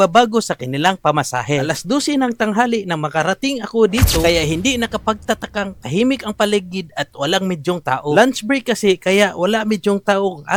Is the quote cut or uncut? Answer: uncut